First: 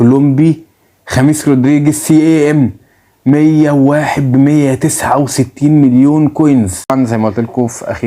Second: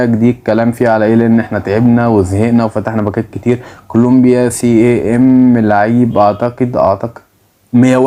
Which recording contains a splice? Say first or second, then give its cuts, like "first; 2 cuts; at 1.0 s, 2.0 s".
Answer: first; 1 cut; at 6.8 s